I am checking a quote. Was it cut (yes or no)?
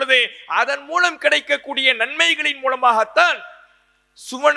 no